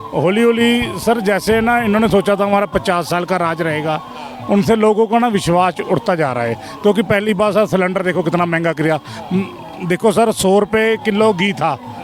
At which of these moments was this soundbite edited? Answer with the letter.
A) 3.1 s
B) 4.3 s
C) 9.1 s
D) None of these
D